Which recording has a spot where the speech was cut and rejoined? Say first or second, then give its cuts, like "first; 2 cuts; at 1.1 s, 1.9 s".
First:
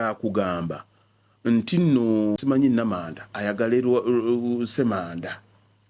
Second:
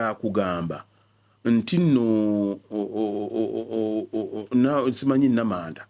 first; 1 cut; at 2.4 s